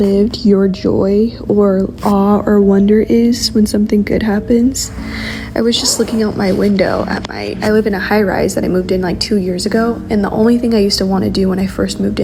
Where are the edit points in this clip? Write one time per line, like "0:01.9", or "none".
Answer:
none